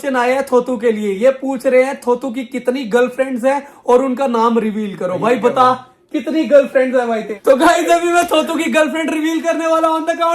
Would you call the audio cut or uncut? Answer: cut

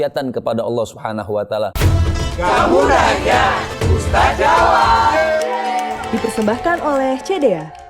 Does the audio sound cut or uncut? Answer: cut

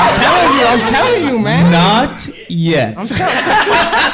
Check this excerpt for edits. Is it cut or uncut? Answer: uncut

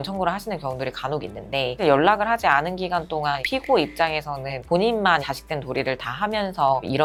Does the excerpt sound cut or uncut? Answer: uncut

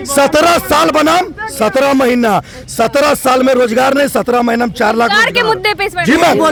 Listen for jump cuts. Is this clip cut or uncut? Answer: uncut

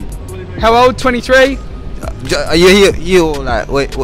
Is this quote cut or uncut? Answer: uncut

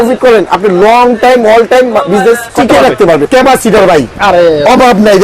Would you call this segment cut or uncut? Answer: cut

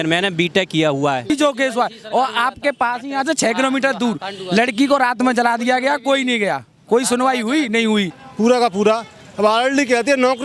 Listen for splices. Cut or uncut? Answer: cut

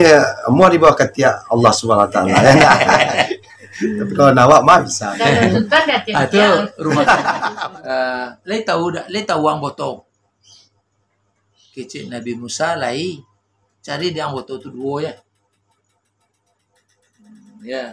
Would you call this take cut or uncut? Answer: cut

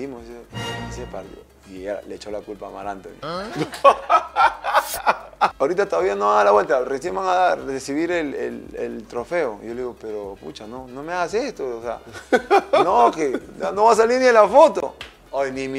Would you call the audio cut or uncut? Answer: cut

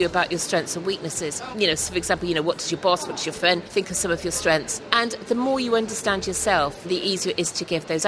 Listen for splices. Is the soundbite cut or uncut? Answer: cut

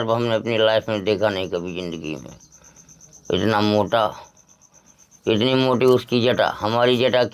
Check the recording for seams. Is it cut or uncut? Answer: uncut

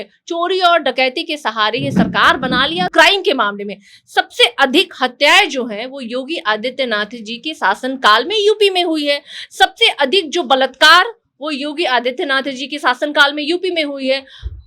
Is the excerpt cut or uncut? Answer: cut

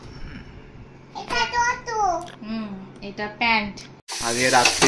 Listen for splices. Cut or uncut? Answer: cut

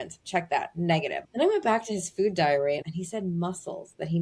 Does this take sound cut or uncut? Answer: cut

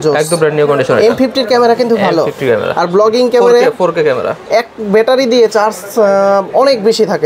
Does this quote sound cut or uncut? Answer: uncut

